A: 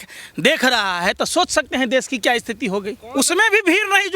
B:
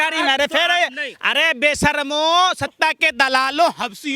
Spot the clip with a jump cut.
A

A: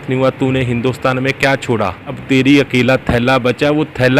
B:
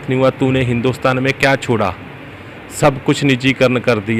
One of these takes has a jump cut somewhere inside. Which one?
A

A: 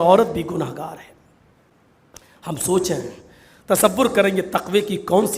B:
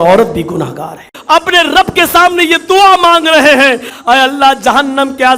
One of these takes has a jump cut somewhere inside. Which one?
B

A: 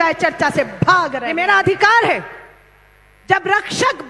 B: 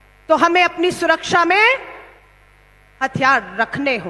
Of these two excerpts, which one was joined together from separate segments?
A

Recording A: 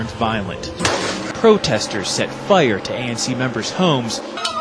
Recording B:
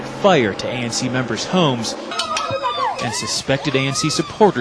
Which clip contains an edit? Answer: A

